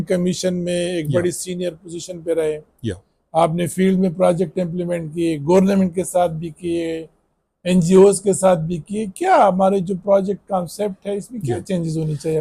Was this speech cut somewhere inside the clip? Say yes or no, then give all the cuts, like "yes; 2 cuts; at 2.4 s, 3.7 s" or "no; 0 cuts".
no; 0 cuts